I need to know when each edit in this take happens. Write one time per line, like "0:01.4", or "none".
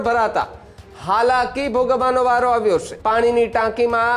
0:02.9